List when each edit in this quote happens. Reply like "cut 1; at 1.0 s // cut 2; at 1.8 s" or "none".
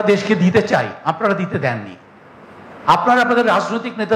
none